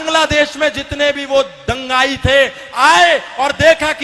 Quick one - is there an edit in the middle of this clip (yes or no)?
no